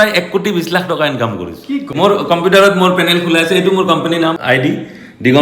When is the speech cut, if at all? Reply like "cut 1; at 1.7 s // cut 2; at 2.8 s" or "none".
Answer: cut 1; at 1.9 s // cut 2; at 4.4 s